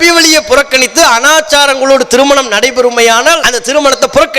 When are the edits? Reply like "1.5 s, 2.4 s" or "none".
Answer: 3.5 s